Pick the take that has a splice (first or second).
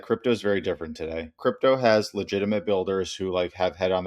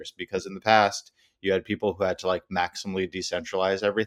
first